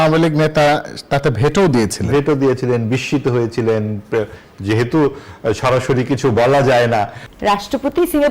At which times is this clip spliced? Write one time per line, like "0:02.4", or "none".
0:07.2